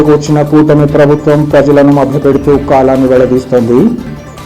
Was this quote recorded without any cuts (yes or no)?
yes